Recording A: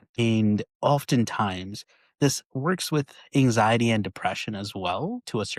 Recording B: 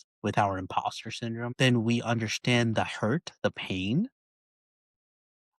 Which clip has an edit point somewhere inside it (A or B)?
B